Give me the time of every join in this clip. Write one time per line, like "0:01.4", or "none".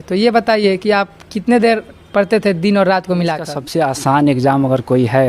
0:03.6